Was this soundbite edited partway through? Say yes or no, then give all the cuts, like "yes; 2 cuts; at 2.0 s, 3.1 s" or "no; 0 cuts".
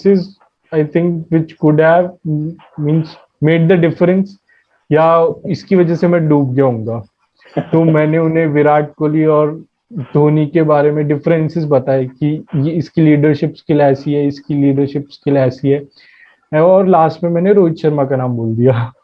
no; 0 cuts